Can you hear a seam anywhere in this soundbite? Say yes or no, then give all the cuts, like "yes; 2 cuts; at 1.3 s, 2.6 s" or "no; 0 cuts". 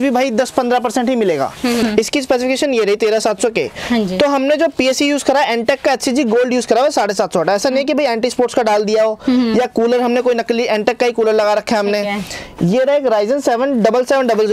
yes; 1 cut; at 1.8 s